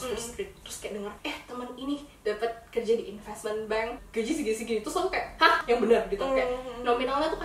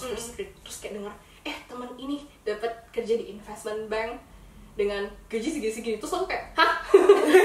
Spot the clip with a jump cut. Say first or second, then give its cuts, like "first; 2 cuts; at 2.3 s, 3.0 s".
first; 3 cuts; at 1.2 s, 4.0 s, 5.6 s